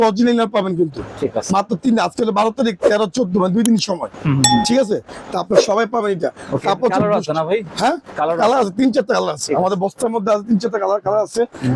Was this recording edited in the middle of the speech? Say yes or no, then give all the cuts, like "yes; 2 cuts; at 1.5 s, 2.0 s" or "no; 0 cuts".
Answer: no; 0 cuts